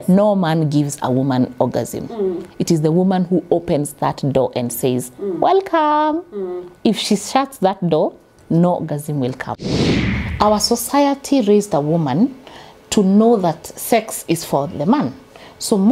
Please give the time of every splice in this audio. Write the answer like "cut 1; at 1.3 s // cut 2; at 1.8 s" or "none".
cut 1; at 9.7 s